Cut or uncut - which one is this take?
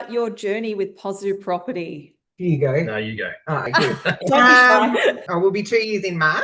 uncut